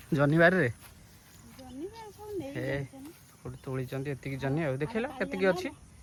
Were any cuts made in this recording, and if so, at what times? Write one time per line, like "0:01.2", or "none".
none